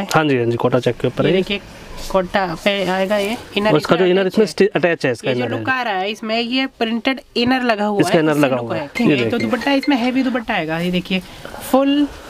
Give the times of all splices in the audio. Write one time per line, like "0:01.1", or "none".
0:09.0

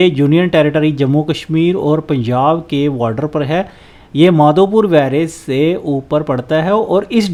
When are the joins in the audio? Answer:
none

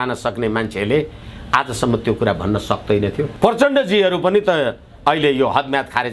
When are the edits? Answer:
0:03.3

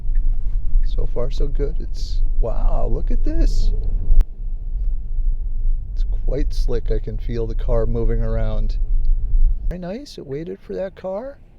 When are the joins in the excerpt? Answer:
0:04.2
0:09.7

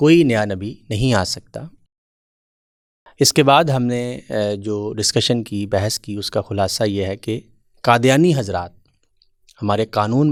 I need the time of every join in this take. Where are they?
none

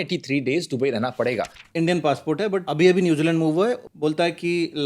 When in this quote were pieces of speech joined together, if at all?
0:01.6
0:02.6
0:03.9

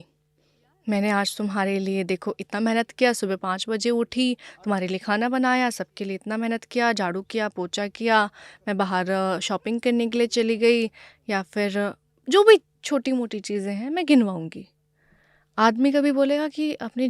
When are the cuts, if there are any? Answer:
none

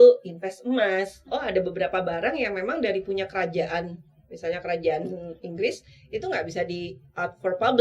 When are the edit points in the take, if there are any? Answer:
0:01.2

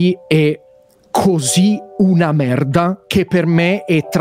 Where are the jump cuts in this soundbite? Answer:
none

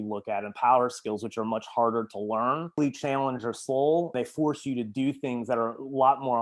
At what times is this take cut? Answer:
0:02.8
0:04.1

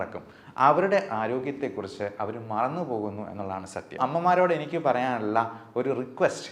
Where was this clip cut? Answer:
0:04.0

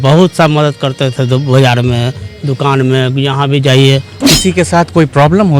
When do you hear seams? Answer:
0:04.2

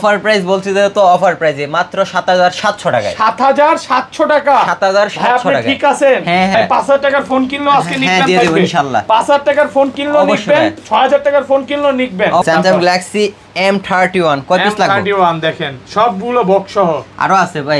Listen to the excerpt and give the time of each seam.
0:06.5
0:12.4

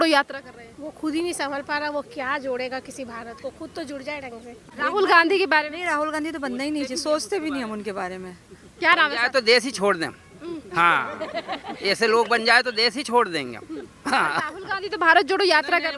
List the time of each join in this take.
0:04.7

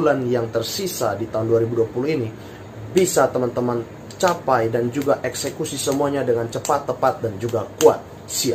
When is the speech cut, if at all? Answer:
none

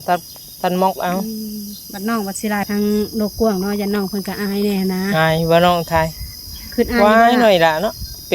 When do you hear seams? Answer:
0:02.7

